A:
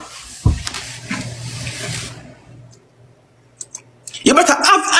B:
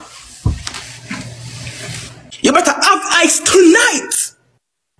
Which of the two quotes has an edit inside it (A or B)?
B